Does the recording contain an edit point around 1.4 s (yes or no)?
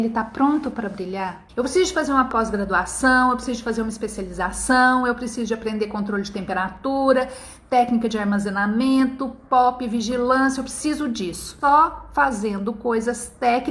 yes